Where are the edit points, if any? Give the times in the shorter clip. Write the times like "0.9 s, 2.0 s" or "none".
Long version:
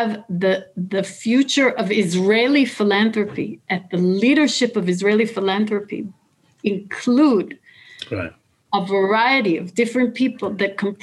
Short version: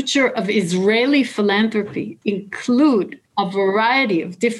2.0 s, 3.2 s

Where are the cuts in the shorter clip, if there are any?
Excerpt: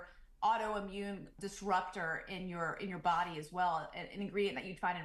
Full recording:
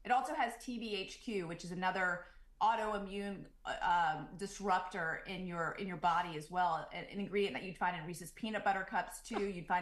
1.3 s

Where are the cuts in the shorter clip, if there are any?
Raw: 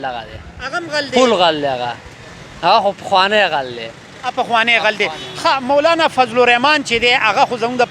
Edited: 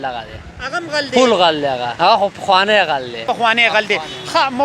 1.9 s, 3.2 s

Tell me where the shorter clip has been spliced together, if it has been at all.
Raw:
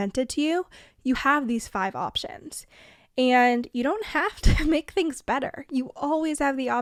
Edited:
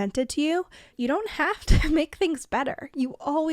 0.9 s

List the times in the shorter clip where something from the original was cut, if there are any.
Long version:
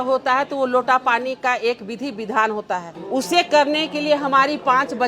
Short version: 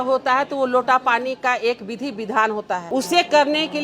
2.8 s

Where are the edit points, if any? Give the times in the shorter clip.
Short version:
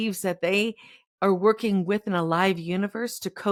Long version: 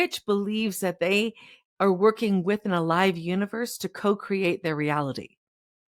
none

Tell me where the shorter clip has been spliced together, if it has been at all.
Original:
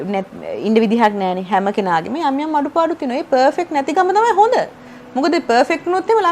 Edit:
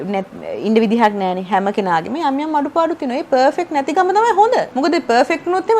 4.7 s

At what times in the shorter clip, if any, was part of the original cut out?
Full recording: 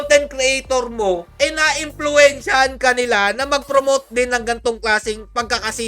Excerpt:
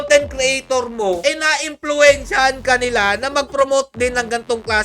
1.2 s

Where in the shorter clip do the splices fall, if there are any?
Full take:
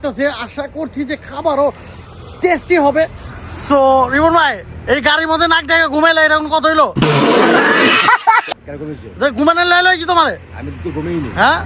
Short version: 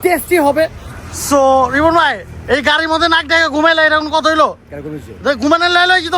4.5 s

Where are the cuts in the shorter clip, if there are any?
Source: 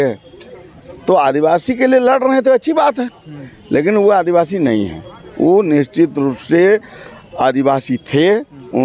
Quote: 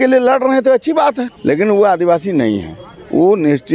1.3 s

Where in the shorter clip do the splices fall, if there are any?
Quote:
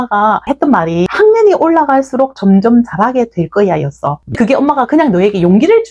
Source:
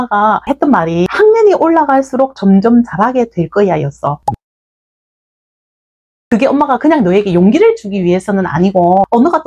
4.2 s

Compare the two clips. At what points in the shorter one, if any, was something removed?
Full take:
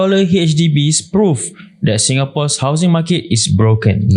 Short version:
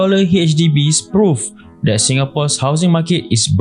none

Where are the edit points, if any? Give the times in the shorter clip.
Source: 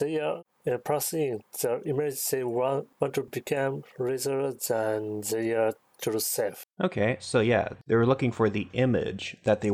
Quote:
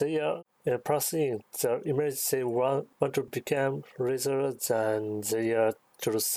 none

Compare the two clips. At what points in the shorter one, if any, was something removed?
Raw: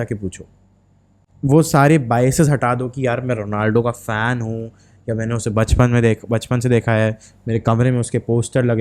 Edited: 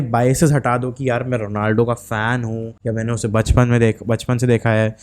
2.7 s

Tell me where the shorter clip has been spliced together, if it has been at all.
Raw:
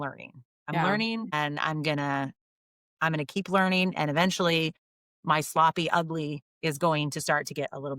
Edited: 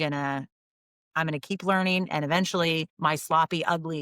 2.9 s

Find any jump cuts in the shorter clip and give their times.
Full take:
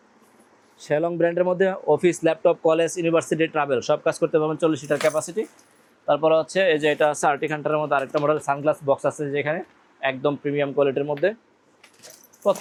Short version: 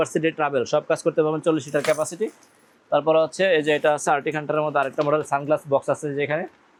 none

